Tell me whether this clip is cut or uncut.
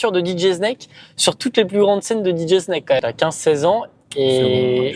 cut